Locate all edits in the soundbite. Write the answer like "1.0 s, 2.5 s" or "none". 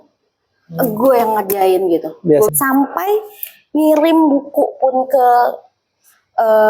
2.5 s